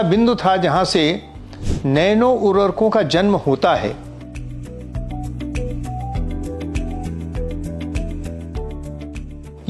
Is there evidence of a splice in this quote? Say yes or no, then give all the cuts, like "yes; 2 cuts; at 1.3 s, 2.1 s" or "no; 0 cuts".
no; 0 cuts